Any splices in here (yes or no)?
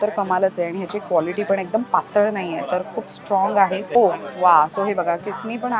yes